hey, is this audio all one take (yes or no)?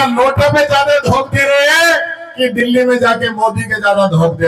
yes